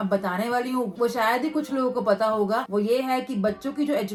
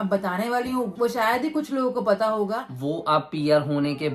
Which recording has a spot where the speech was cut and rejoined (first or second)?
second